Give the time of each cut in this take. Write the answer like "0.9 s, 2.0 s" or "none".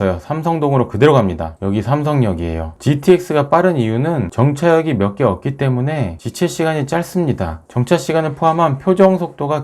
4.3 s